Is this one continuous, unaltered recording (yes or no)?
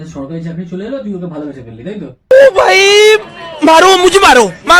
yes